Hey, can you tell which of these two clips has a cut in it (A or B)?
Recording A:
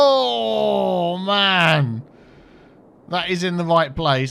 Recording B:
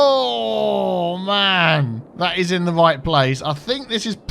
B